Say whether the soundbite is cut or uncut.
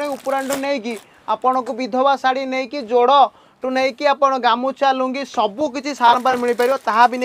uncut